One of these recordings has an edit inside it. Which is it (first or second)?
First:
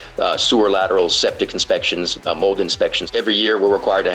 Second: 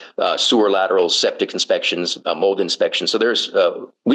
first